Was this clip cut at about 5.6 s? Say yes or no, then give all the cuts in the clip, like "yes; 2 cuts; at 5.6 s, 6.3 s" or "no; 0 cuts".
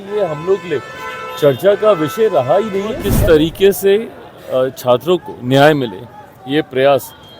no; 1 cut; at 3.1 s